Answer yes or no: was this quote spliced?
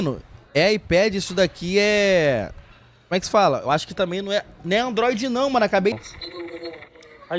yes